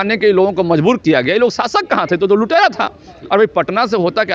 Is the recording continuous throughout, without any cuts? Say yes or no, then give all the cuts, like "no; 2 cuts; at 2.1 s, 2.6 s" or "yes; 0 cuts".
yes; 0 cuts